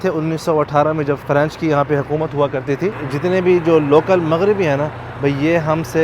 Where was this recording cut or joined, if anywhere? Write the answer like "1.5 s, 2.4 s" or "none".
1.2 s, 3.1 s